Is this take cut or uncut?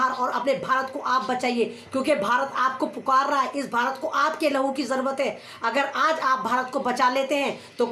uncut